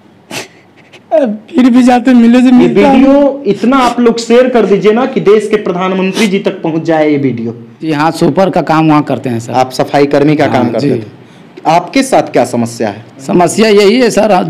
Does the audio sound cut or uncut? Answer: cut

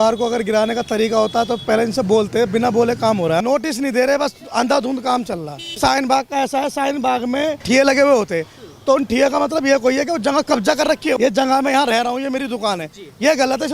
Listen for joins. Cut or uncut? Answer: cut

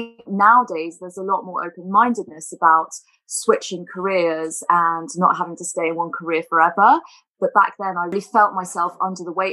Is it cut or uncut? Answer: cut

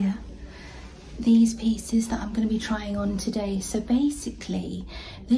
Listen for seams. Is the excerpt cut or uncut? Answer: uncut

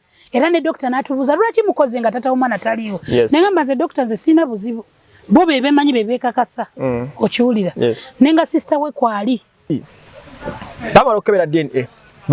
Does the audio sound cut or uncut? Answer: cut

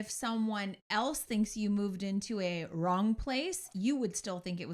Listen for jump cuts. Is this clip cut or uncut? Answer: uncut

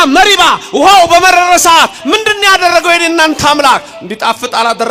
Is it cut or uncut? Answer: uncut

